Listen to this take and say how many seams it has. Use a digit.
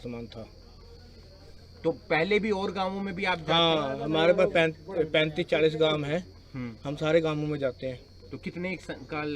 0